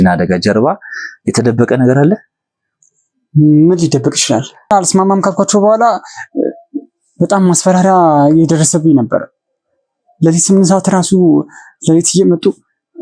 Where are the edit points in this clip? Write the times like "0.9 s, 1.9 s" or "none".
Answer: 4.7 s